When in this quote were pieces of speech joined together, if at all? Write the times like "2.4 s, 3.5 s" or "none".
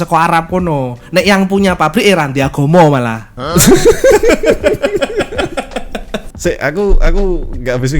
6.2 s